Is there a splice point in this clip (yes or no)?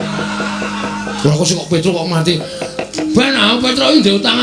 no